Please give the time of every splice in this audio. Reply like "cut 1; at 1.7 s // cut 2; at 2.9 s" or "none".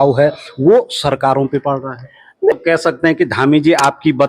cut 1; at 2.5 s